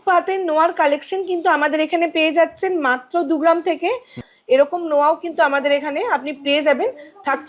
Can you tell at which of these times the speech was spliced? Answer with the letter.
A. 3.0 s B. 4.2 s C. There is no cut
B